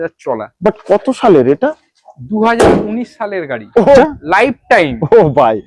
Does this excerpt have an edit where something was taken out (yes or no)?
yes